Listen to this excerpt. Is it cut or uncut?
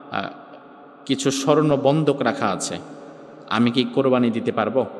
uncut